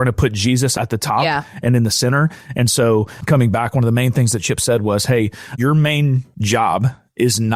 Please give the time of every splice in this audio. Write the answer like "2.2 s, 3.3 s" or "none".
0.7 s, 3.1 s, 5.5 s, 6.3 s